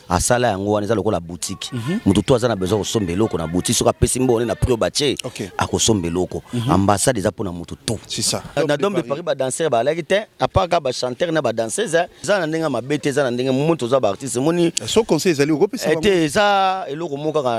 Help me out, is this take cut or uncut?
cut